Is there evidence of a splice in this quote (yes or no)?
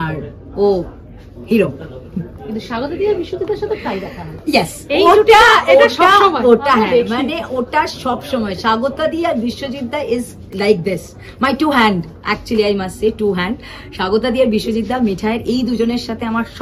no